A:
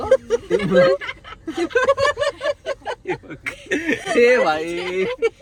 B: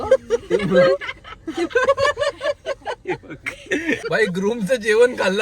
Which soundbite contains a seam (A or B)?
B